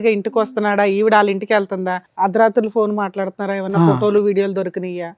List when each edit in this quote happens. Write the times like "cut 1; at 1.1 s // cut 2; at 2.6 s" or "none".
cut 1; at 2.0 s